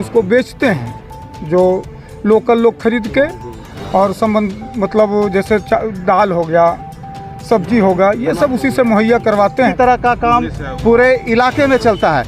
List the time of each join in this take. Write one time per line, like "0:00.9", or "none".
0:09.7